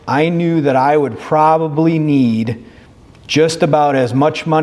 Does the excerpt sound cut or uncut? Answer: uncut